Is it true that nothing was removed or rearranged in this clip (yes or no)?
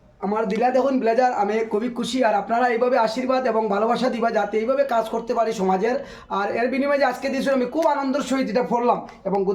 yes